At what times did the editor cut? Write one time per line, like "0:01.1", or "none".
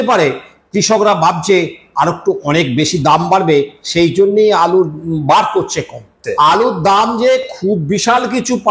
0:06.2